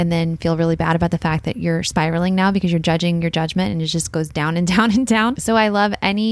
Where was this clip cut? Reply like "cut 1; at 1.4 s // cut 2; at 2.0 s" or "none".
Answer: cut 1; at 5.4 s